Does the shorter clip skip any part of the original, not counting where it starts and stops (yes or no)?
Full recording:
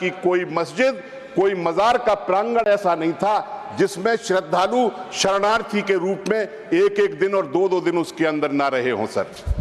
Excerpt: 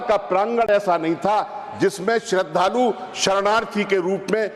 no